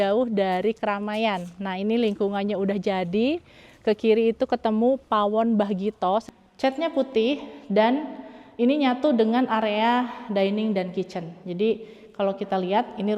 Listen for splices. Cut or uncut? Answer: cut